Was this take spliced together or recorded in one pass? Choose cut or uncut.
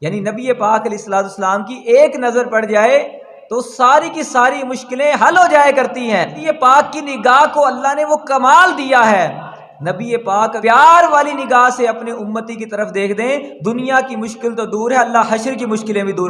cut